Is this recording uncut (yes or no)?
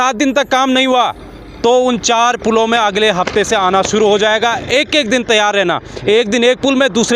yes